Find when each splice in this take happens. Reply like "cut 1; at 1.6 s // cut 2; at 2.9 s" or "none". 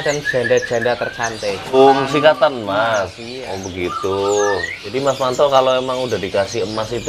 cut 1; at 1.7 s // cut 2; at 4.9 s